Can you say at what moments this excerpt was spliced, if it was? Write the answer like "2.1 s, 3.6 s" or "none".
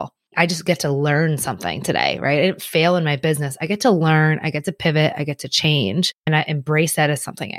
6.3 s

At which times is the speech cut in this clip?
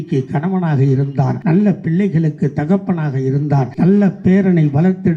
1.4 s, 3.7 s

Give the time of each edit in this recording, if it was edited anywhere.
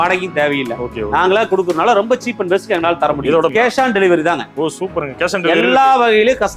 3.5 s

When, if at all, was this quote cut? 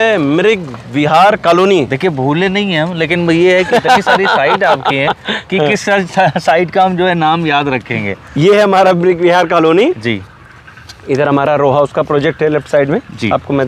none

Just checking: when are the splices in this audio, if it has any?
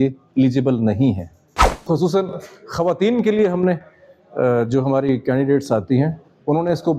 1.8 s

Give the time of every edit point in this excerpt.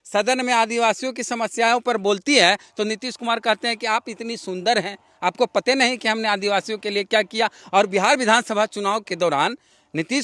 none

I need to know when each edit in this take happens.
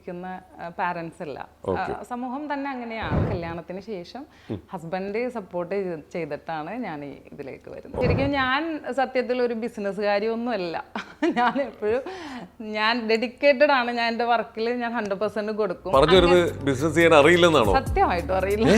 3.2 s, 8.0 s

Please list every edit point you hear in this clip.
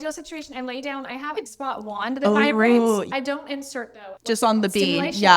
1.5 s

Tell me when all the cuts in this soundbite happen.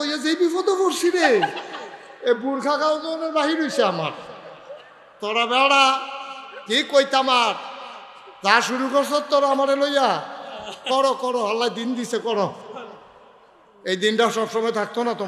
none

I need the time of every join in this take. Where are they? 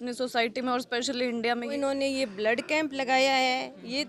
1.7 s

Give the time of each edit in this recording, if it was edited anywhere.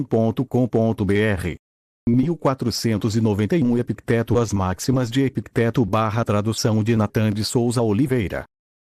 1.0 s

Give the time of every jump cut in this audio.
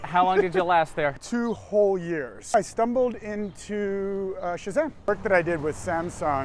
1.2 s, 2.5 s, 5.1 s

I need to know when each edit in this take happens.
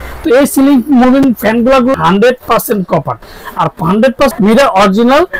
1.9 s, 4.3 s

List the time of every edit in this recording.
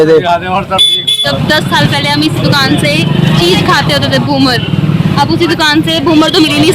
1.2 s

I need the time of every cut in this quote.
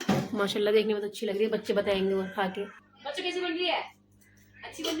2.7 s

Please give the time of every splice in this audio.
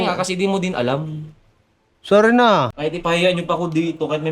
2.7 s

